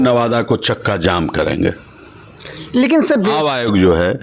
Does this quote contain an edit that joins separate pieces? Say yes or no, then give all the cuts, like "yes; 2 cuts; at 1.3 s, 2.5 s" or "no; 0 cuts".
yes; 1 cut; at 3.3 s